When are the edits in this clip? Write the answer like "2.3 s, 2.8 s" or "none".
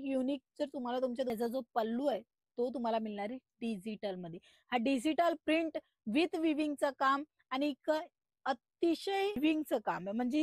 1.3 s, 9.4 s